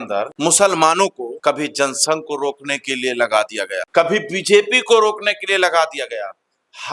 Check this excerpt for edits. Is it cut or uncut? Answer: uncut